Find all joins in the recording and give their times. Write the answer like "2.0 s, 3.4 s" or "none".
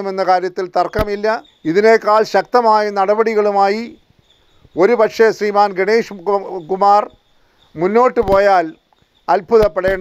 1.5 s